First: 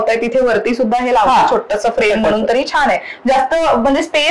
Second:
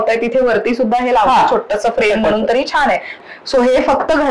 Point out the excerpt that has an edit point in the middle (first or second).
second